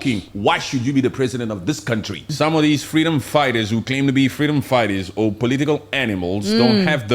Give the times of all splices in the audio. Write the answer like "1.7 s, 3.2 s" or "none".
2.3 s